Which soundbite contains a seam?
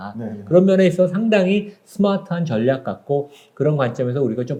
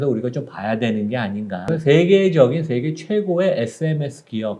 second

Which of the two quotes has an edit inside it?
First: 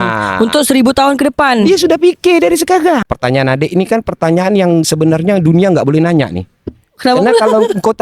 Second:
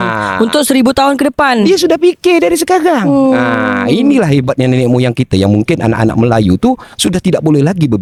first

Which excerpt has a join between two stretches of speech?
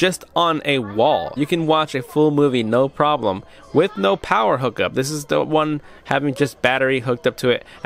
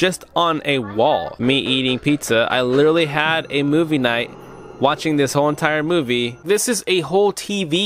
second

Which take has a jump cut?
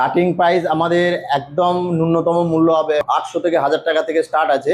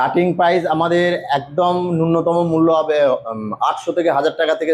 first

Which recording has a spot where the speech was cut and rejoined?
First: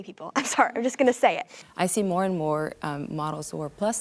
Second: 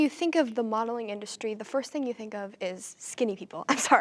first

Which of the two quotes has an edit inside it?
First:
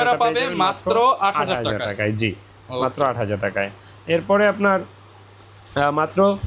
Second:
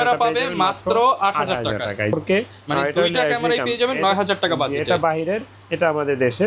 second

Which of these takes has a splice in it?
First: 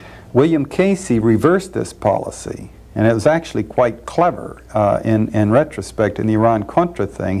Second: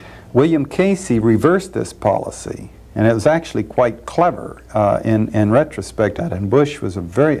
first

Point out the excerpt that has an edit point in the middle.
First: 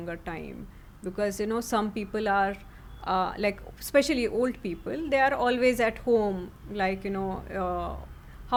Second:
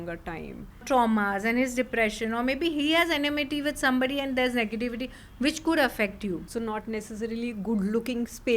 second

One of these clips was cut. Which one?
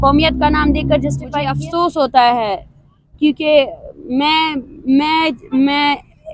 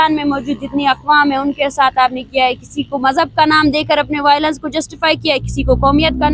first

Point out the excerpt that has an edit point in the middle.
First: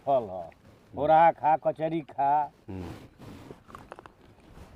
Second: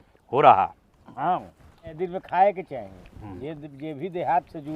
second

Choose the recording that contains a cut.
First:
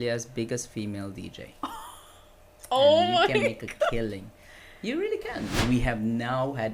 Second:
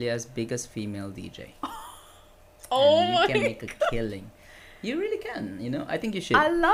first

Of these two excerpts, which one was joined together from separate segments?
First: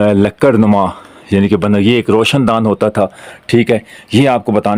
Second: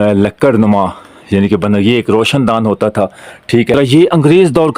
second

